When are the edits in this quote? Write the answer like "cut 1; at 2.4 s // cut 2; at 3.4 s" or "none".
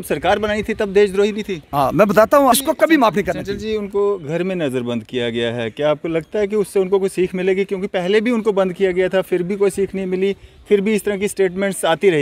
cut 1; at 2.5 s